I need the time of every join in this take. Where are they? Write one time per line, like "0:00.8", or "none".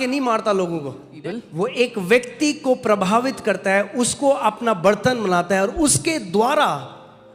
0:01.1

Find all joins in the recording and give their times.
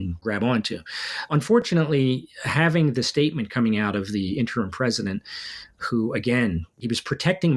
none

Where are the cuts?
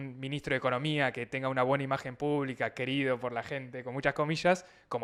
none

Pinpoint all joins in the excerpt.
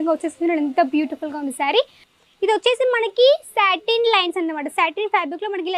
0:02.1

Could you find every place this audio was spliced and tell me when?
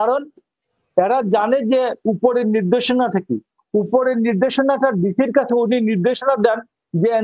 none

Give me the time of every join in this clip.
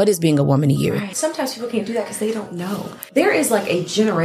0:01.1
0:03.0

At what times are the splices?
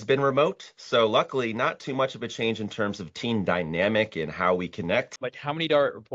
0:05.1

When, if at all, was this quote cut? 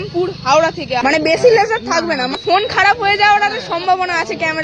0:01.0
0:02.4

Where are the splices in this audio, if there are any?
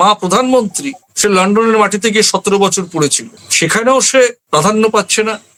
none

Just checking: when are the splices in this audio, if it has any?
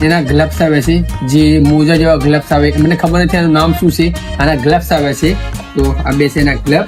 none

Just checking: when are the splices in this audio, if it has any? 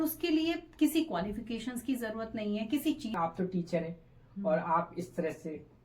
0:03.2

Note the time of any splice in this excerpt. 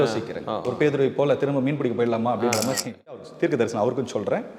0:03.2

